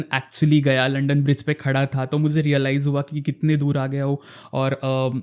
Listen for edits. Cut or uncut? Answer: uncut